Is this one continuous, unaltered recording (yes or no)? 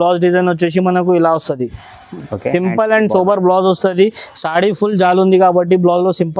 yes